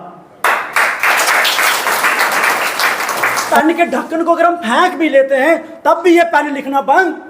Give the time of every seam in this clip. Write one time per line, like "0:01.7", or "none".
0:03.5